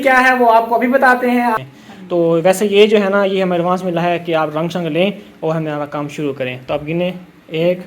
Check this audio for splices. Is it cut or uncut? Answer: cut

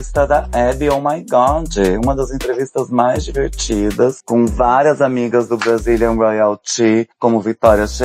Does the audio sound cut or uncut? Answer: uncut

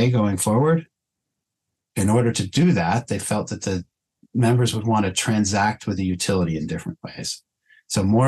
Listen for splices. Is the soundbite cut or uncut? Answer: uncut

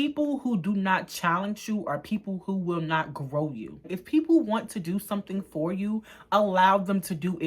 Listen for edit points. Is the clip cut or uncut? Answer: cut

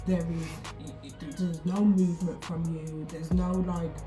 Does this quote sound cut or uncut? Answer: uncut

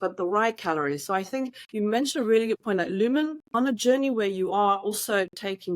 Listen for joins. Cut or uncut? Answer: cut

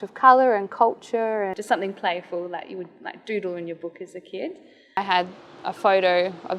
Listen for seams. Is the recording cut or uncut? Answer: cut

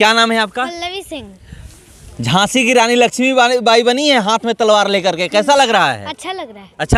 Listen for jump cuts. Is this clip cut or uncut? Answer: uncut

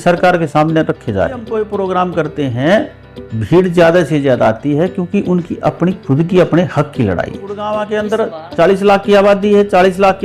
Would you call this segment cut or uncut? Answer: cut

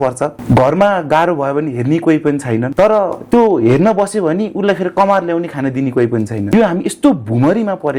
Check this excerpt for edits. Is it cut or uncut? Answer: uncut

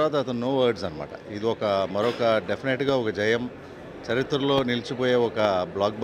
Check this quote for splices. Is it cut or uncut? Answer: uncut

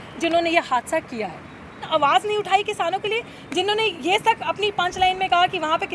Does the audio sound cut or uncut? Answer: cut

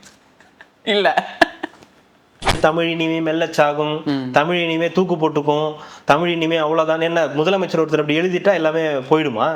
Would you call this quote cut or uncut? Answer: cut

